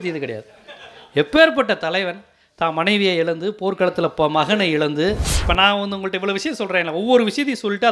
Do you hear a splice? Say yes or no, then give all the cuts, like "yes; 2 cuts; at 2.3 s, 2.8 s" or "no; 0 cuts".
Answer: yes; 1 cut; at 5.3 s